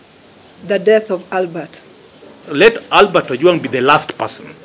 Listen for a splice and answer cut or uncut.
cut